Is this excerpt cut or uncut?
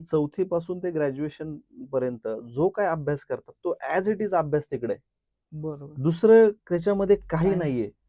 uncut